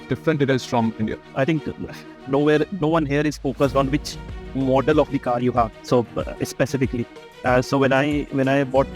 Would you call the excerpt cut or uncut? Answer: cut